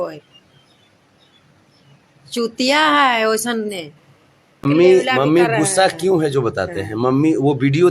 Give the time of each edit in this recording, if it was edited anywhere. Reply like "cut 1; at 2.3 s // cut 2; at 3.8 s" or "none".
cut 1; at 4.6 s